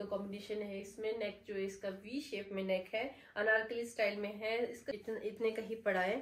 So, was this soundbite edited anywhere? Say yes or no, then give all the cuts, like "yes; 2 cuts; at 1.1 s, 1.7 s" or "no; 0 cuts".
yes; 1 cut; at 4.9 s